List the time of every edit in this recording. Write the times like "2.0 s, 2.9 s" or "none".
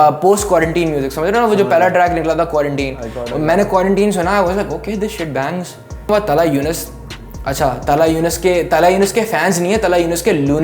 6.1 s